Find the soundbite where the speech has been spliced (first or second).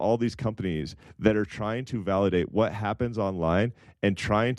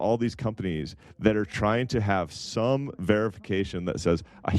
second